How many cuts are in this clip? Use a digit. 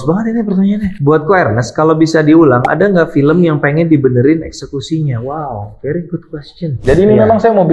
2